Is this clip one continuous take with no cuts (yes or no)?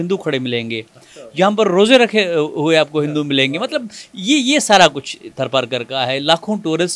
yes